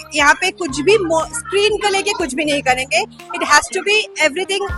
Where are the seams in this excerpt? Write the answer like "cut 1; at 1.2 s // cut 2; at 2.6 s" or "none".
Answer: none